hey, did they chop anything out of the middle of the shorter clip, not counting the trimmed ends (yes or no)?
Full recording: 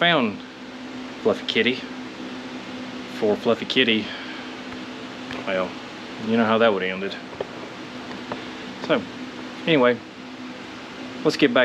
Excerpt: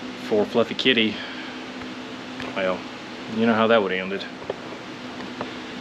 no